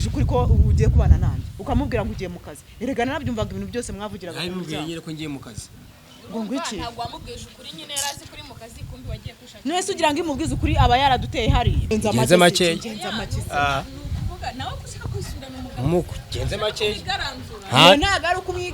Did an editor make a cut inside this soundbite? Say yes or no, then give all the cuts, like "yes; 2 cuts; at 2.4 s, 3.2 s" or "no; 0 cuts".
yes; 1 cut; at 11.8 s